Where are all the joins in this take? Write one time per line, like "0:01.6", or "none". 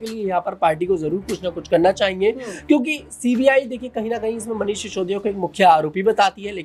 none